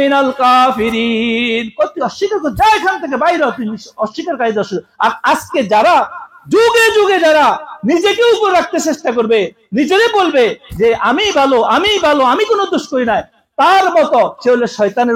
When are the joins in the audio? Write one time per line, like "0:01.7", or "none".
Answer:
none